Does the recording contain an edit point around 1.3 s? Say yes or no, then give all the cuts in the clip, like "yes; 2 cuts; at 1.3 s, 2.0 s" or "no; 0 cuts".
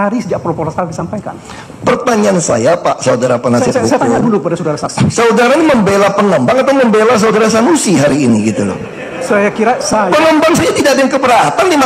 yes; 1 cut; at 1.3 s